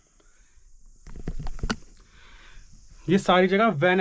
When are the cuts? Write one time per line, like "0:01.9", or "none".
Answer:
none